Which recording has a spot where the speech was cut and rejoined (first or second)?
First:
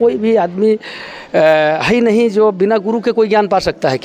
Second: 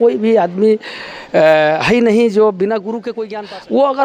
second